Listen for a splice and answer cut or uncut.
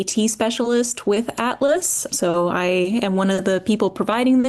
uncut